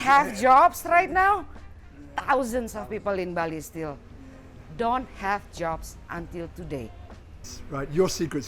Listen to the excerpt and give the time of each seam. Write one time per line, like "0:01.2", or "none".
0:07.5